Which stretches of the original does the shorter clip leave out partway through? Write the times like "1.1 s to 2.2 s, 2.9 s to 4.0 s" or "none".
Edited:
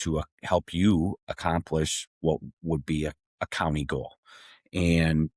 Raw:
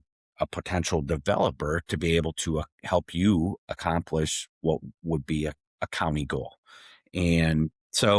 none